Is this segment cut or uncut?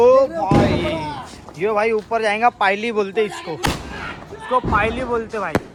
uncut